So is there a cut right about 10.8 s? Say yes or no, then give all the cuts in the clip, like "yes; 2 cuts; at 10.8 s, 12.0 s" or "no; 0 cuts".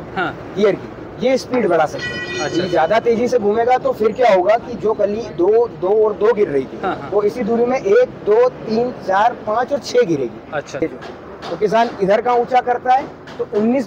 yes; 1 cut; at 10.8 s